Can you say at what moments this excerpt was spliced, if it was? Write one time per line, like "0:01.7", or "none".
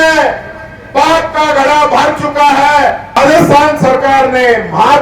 0:03.2